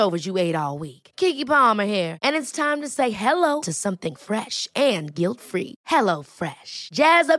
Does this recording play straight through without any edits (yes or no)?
yes